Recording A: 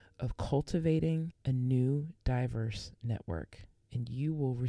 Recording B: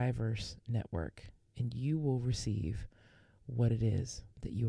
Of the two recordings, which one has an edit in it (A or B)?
A